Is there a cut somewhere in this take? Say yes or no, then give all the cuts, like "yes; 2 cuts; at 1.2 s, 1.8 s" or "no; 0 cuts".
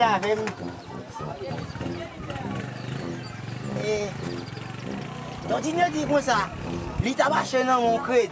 yes; 1 cut; at 7.4 s